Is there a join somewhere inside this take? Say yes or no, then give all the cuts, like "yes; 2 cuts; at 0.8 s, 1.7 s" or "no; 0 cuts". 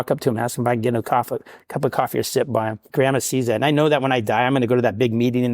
yes; 1 cut; at 2.8 s